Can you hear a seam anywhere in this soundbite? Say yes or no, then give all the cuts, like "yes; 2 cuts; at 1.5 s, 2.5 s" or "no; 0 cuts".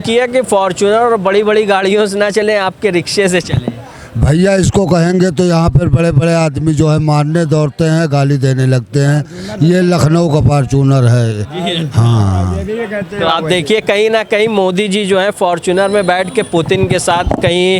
no; 0 cuts